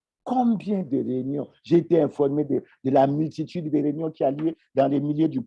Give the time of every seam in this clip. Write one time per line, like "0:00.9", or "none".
none

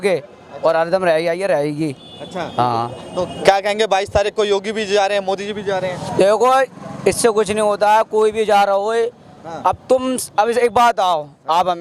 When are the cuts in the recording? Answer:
none

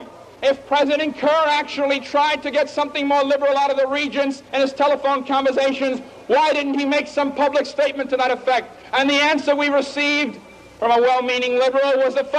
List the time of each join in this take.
0:01.4

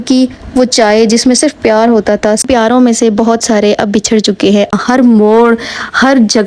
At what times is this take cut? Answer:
0:02.5
0:04.7

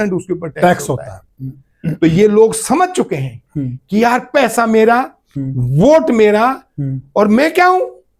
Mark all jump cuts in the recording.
none

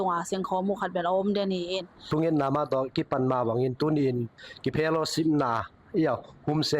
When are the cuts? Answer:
0:01.9

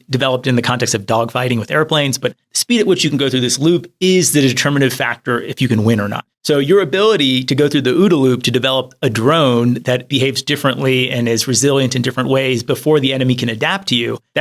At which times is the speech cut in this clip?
none

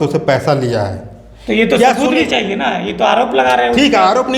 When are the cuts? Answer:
none

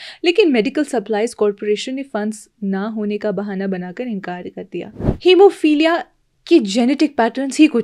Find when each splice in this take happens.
0:05.0

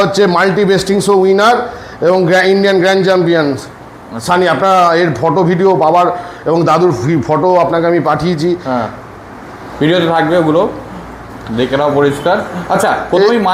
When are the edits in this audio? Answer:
none

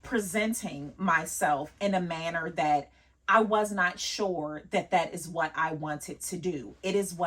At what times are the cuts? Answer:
none

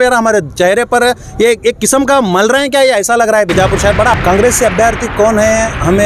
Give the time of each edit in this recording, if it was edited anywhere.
0:04.2

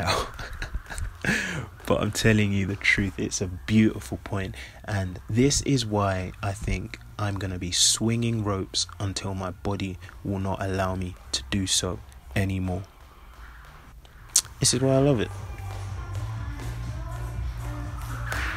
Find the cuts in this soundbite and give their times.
0:15.3

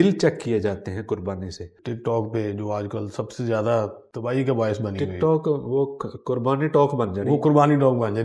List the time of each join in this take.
0:01.7
0:04.1

